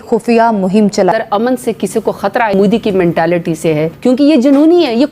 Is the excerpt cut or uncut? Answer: cut